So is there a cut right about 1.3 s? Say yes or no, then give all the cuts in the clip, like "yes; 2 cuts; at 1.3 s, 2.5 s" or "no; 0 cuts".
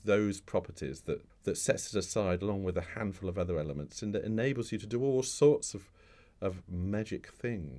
yes; 1 cut; at 1.3 s